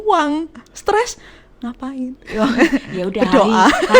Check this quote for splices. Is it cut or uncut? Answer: uncut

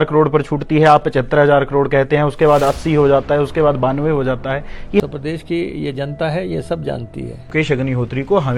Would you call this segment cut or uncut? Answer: cut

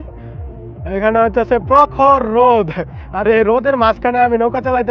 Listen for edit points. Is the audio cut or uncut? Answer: uncut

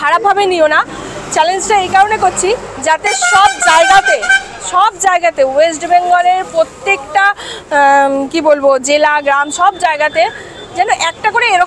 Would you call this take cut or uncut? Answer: uncut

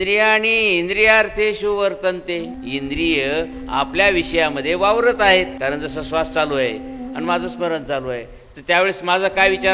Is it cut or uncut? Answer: cut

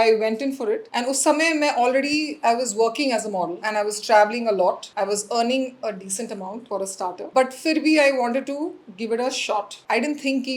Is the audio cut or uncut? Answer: uncut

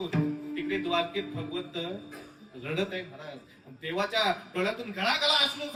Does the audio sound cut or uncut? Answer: uncut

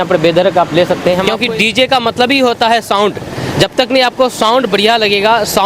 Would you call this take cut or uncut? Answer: cut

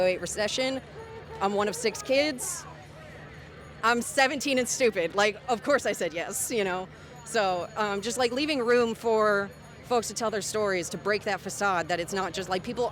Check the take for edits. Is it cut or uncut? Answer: uncut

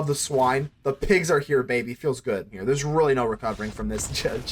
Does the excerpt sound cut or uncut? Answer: cut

